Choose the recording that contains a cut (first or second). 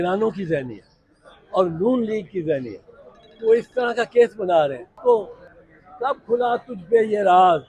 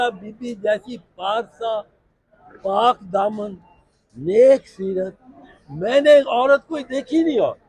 first